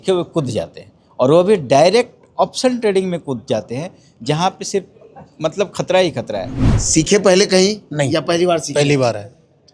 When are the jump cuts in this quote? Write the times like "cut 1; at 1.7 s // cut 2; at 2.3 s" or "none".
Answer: cut 1; at 6.6 s

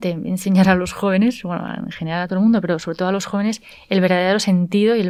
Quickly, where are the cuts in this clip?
none

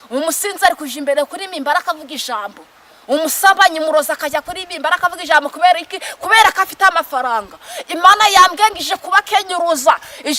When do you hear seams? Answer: none

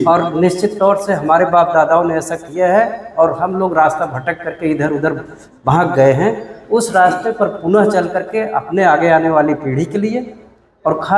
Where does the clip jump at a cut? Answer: none

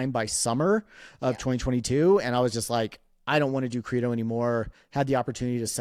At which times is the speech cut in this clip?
none

